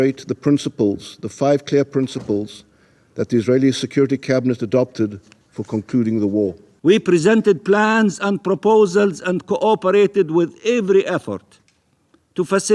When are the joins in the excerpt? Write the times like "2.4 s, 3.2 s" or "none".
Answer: 6.7 s